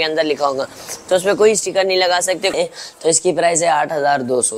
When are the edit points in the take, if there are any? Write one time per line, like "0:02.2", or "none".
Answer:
0:02.5